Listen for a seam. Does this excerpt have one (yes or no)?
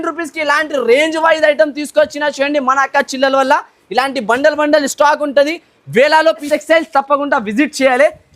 yes